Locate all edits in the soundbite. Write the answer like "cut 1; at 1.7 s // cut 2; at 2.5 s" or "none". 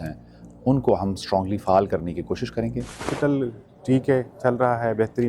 cut 1; at 3.1 s